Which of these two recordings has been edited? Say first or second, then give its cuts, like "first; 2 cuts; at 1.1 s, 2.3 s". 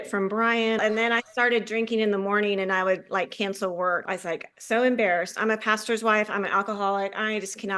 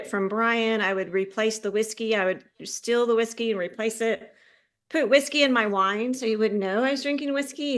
first; 2 cuts; at 0.8 s, 4.0 s